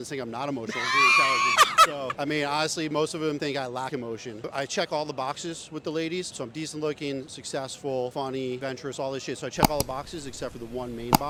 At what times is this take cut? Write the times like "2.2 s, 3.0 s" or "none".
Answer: none